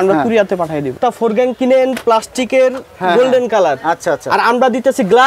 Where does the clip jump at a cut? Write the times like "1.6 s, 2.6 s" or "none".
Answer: 0.9 s

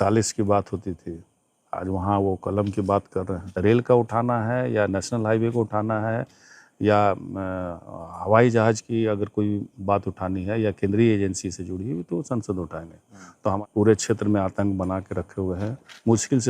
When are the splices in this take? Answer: 3.4 s, 13.6 s

